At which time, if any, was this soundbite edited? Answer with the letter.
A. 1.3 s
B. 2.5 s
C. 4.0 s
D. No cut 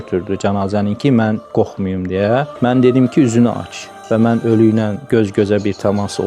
C